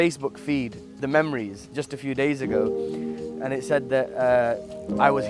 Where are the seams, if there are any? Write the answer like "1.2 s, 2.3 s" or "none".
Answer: 1.0 s